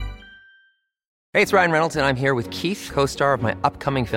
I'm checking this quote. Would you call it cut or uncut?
cut